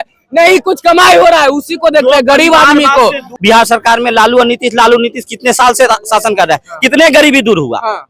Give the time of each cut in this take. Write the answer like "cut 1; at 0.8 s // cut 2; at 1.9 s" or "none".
cut 1; at 3.3 s